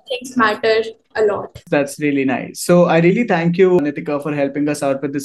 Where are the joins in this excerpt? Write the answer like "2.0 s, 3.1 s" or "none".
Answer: none